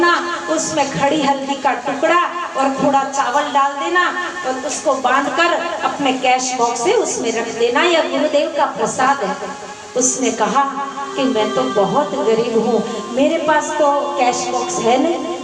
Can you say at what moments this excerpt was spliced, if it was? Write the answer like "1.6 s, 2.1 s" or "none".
none